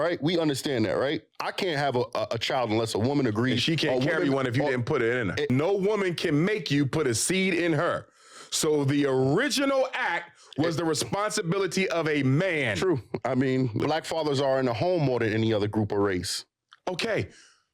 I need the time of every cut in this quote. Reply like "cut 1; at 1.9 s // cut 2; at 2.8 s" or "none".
cut 1; at 5.5 s // cut 2; at 13.8 s